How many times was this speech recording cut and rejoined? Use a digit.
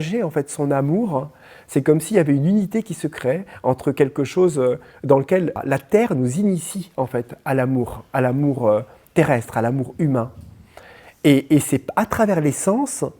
1